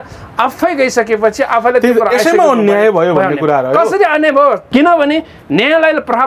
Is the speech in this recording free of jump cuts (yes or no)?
no